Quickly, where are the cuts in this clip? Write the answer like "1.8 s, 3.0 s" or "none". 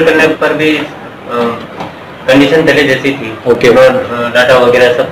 none